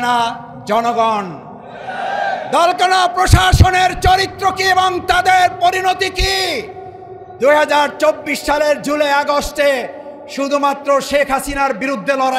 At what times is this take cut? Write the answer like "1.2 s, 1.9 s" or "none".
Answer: none